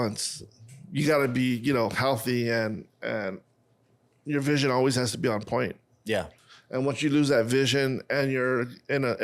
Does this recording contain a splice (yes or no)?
no